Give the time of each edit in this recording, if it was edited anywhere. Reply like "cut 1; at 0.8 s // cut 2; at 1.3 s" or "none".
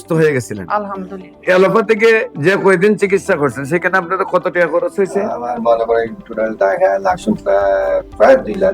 cut 1; at 1.4 s